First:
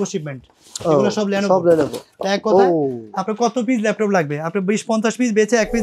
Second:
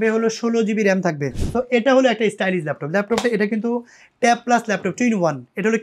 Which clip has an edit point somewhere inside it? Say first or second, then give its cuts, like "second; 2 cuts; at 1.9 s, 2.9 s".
second; 1 cut; at 1.3 s